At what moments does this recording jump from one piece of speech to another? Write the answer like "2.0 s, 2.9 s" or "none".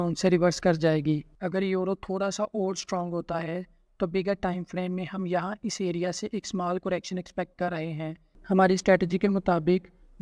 1.3 s, 8.3 s